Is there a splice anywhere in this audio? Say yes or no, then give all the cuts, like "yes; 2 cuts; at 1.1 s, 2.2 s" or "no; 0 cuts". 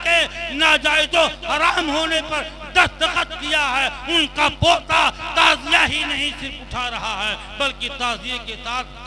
no; 0 cuts